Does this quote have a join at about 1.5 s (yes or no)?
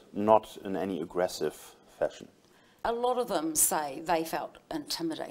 no